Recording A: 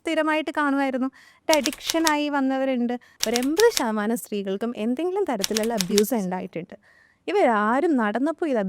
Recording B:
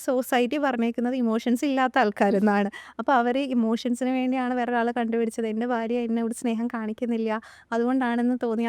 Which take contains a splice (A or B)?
A